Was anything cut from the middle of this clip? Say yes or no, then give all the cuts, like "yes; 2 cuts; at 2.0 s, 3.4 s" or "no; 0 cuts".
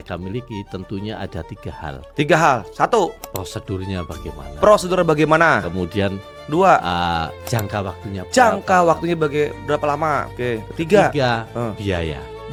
no; 0 cuts